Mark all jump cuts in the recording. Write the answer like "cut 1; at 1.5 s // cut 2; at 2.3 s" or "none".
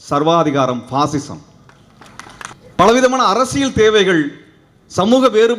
cut 1; at 2.5 s